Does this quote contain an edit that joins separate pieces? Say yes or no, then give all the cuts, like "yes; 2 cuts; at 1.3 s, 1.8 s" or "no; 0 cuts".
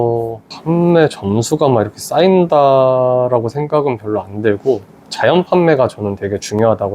no; 0 cuts